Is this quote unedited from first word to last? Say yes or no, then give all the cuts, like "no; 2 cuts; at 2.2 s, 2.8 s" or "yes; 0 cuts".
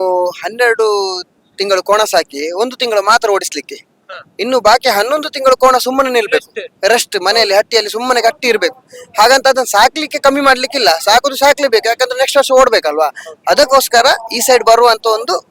yes; 0 cuts